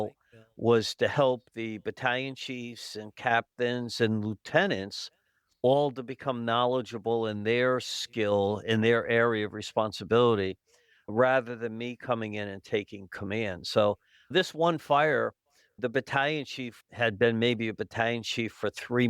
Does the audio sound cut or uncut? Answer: uncut